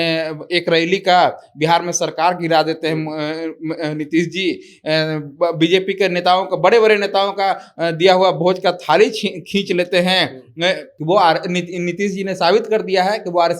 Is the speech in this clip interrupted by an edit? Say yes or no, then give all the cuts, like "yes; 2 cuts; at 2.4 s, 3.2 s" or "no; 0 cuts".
yes; 1 cut; at 10.9 s